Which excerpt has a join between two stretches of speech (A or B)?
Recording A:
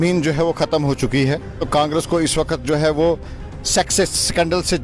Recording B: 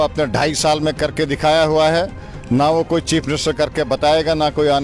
A